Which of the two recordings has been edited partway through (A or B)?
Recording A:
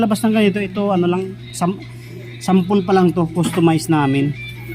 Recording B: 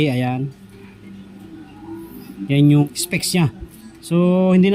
B